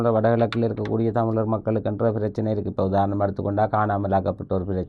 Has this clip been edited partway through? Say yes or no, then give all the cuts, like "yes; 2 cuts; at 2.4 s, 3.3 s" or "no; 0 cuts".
no; 0 cuts